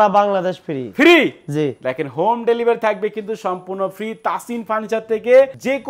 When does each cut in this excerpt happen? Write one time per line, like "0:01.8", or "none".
none